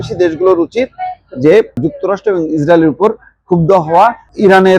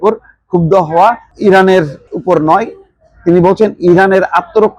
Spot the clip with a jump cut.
first; 1 cut; at 1.8 s

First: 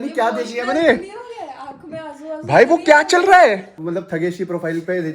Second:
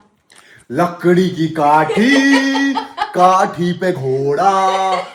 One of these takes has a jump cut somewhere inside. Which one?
first; 1 cut; at 3.7 s

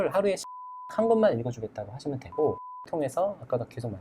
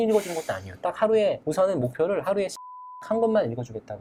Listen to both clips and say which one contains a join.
first; 1 cut; at 2.9 s

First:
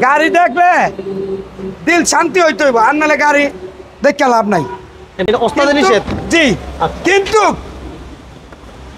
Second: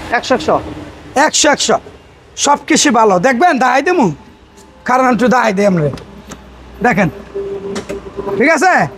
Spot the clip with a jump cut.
first; 1 cut; at 5.2 s

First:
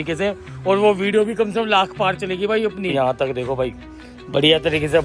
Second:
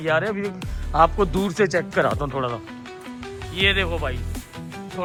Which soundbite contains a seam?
first; 1 cut; at 2.9 s

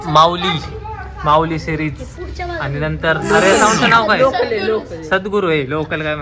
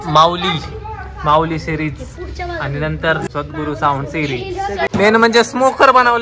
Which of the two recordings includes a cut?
second; 2 cuts; at 3.2 s, 4.9 s

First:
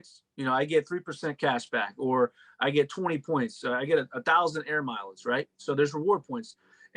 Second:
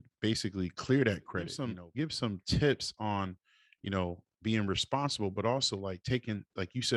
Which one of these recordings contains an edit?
second; 1 cut; at 1.6 s

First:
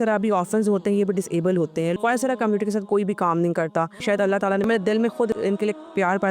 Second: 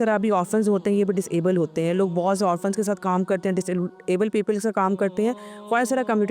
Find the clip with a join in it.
first; 3 cuts; at 1.9 s, 4.2 s, 5.3 s

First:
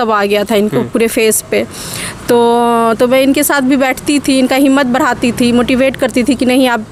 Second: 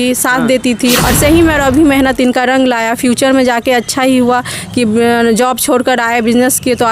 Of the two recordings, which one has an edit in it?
second; 1 cut; at 1.0 s

